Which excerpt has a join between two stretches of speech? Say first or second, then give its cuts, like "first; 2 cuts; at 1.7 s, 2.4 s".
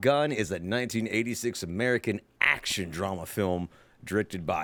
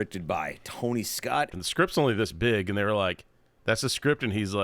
second; 1 cut; at 1.6 s